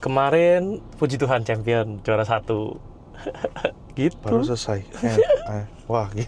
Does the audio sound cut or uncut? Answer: uncut